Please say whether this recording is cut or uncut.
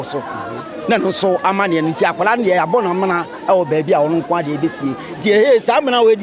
uncut